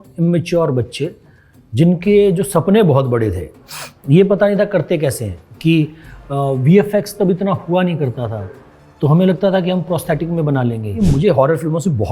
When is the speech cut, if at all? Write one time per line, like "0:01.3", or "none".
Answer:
0:10.9